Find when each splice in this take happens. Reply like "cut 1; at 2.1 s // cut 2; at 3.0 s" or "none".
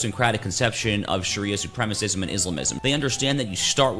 cut 1; at 2.7 s